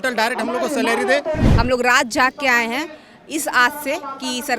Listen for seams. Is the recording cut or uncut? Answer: cut